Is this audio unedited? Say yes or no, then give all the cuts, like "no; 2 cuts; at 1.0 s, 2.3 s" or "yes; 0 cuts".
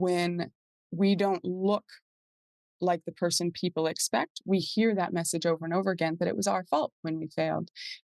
yes; 0 cuts